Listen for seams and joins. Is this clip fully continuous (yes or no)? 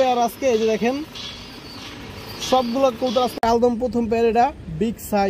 no